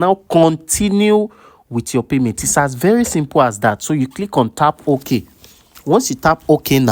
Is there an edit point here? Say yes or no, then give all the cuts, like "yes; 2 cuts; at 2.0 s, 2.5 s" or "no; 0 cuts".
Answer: no; 0 cuts